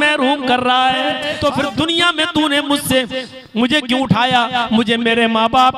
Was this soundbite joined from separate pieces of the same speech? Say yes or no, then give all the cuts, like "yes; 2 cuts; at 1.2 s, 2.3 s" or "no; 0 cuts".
yes; 1 cut; at 1.2 s